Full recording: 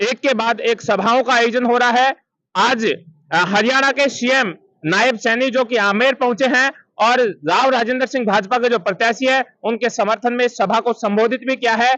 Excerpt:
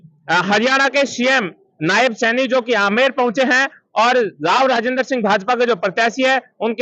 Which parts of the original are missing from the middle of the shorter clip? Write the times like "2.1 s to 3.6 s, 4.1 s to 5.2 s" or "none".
none